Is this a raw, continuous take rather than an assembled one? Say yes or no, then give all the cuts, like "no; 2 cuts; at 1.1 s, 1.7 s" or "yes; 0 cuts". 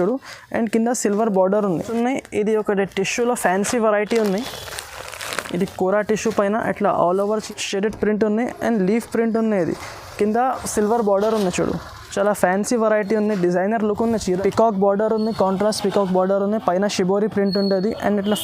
no; 3 cuts; at 1.8 s, 7.4 s, 14.2 s